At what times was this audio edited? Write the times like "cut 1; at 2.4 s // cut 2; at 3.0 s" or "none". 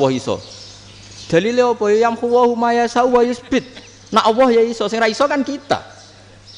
none